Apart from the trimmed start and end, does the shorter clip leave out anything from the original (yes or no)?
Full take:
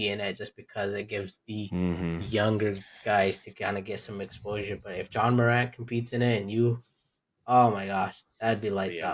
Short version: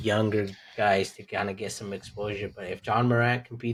no